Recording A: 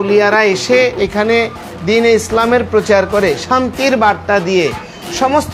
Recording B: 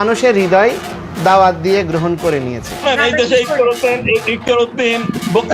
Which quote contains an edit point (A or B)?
B